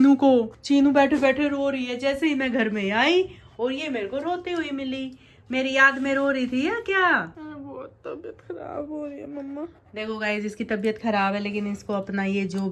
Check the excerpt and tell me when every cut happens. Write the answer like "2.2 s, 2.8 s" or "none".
none